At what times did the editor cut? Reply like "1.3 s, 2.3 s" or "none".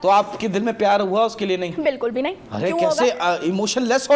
none